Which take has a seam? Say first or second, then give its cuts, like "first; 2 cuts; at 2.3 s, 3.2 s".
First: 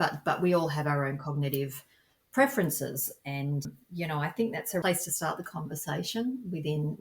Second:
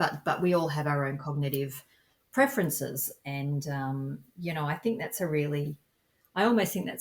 first; 2 cuts; at 3.6 s, 4.8 s